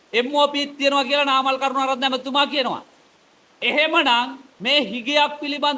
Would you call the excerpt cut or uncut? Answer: uncut